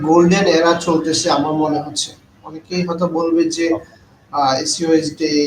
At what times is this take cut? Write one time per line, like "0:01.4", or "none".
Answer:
none